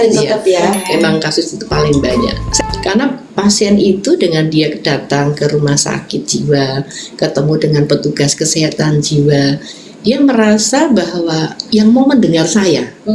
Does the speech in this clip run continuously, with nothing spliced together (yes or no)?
no